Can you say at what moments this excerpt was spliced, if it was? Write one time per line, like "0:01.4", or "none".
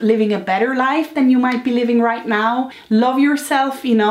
0:02.7